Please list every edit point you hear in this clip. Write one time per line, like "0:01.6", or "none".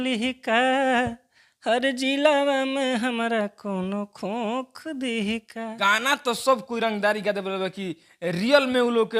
0:05.9